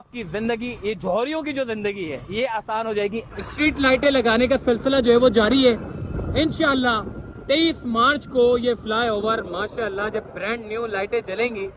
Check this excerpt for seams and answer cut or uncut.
cut